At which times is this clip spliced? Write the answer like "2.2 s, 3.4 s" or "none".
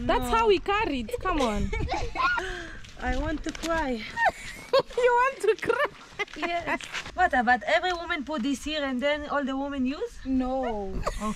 2.3 s, 6.9 s